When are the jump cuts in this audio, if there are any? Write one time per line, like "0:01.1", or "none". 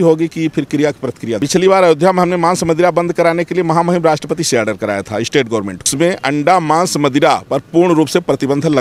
0:01.4
0:05.8